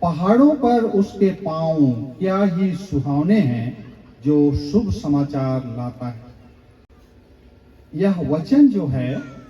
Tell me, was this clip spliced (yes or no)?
no